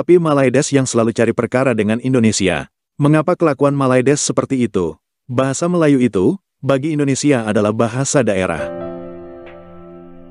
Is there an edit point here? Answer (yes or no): yes